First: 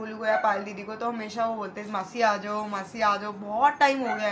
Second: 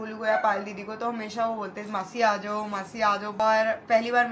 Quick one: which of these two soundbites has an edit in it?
second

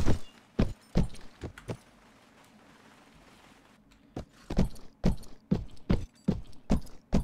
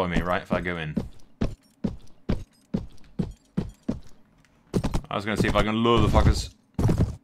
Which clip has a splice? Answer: first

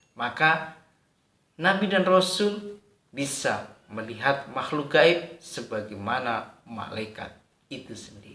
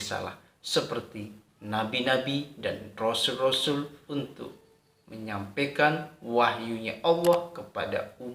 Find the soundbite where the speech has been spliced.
second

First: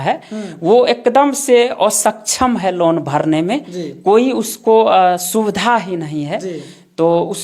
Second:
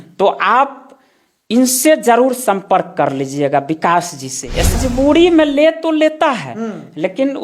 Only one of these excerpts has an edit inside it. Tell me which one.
second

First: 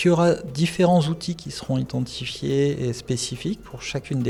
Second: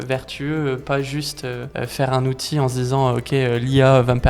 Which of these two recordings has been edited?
second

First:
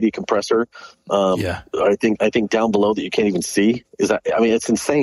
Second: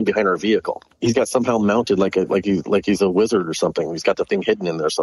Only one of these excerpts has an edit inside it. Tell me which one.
second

